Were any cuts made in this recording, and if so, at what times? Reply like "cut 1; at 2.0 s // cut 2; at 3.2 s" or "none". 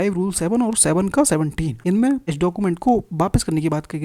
cut 1; at 1.7 s // cut 2; at 2.3 s